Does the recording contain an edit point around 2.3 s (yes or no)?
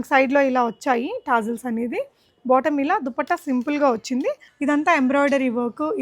no